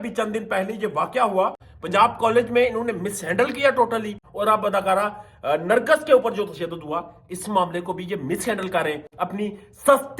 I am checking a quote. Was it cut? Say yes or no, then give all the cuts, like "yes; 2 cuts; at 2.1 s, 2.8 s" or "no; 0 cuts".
yes; 2 cuts; at 1.7 s, 4.2 s